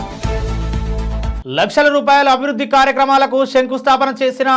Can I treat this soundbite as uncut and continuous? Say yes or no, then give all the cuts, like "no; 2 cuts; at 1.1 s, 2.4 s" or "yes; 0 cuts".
no; 1 cut; at 1.3 s